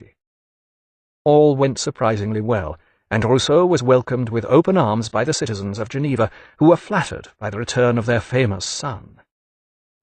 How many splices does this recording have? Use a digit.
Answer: 0